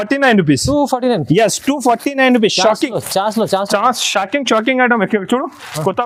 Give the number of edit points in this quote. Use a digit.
0